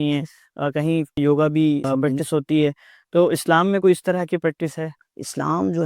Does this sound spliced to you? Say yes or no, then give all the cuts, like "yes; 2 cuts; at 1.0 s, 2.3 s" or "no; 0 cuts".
yes; 3 cuts; at 1.2 s, 1.9 s, 4.9 s